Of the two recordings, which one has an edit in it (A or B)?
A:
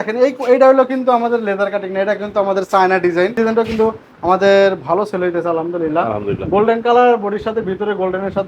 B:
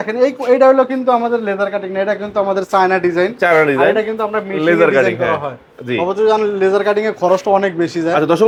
A